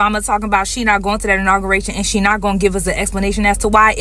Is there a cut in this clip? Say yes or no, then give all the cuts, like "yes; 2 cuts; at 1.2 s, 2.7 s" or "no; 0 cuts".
no; 0 cuts